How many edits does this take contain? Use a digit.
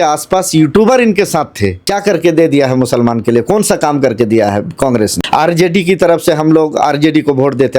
2